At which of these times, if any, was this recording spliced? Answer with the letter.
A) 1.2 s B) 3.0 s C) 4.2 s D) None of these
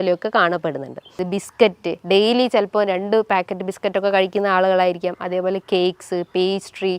A